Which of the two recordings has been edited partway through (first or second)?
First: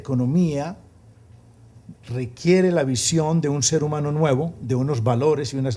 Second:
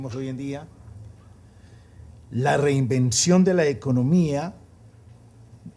second